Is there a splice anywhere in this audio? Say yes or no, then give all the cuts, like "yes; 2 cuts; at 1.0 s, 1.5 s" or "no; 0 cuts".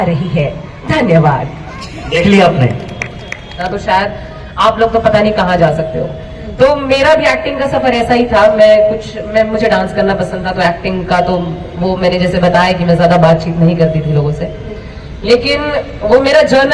yes; 1 cut; at 3.6 s